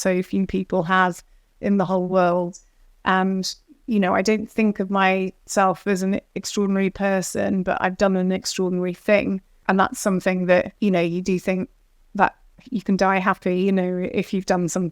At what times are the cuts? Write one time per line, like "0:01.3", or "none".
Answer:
0:09.6
0:10.7